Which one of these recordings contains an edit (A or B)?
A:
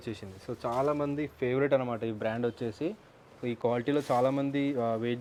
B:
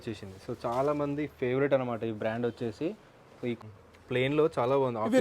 B